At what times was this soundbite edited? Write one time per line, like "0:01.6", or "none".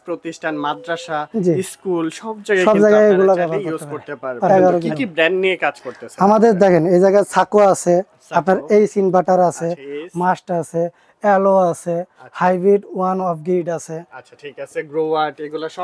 0:04.5